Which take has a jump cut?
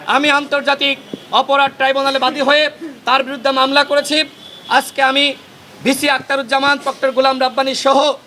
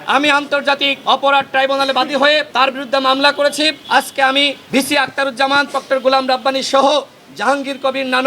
second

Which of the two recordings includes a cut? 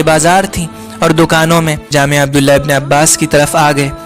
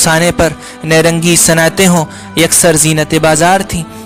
first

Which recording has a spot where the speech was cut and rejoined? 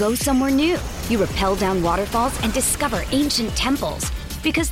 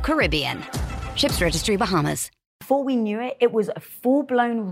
second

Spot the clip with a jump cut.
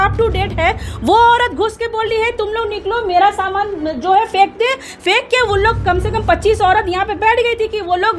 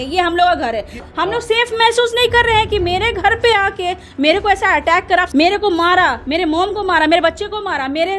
second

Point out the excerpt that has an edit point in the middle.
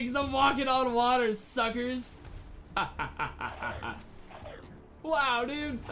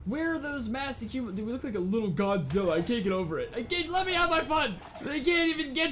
second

